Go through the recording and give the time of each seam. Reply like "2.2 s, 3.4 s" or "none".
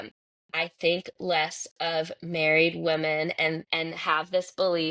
3.7 s